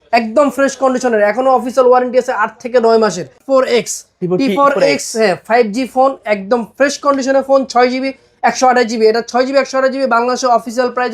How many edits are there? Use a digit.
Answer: 1